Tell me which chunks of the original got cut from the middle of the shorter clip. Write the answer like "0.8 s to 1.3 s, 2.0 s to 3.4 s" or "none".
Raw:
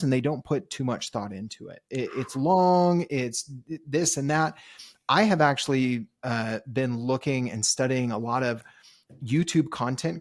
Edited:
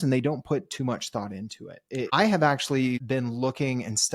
2.1 s to 5.1 s, 6.0 s to 6.7 s